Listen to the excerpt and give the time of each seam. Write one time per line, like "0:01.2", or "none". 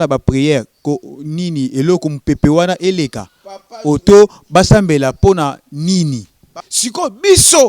0:06.6